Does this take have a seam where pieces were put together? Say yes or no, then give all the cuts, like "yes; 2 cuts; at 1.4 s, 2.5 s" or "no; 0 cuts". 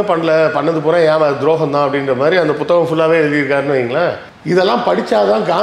no; 0 cuts